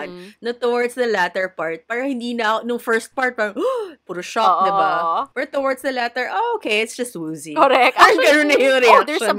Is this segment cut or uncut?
uncut